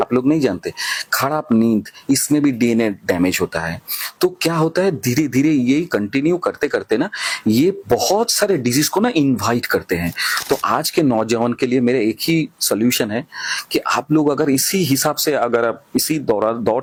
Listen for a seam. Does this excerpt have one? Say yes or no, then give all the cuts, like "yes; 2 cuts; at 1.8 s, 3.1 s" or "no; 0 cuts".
no; 0 cuts